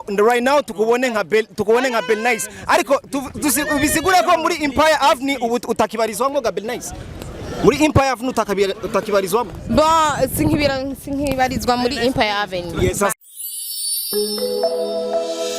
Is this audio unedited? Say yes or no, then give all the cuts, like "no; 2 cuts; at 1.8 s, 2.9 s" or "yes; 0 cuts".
no; 1 cut; at 13.1 s